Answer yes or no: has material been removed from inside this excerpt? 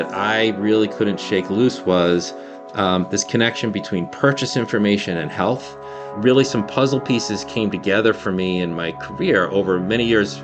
no